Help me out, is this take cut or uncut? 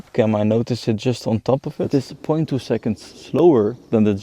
cut